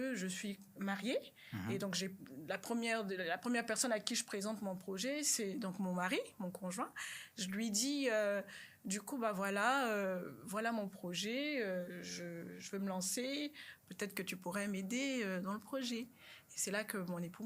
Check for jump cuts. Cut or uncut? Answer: uncut